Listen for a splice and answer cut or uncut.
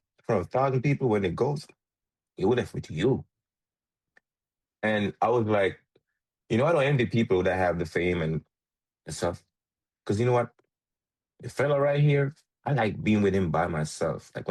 uncut